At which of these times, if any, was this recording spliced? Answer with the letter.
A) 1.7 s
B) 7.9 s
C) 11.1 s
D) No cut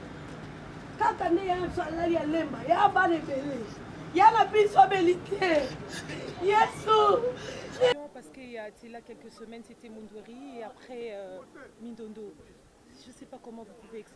B